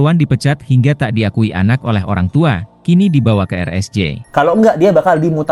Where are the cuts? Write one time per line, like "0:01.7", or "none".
0:04.2